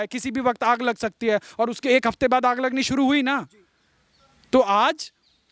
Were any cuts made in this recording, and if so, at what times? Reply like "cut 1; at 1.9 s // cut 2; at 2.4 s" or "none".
none